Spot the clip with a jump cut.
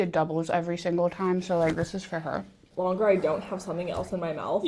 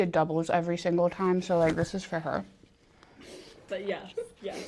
first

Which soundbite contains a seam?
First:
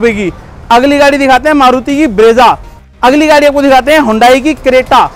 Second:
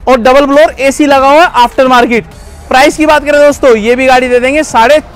first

